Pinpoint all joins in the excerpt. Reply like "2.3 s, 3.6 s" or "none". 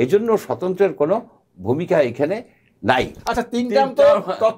3.1 s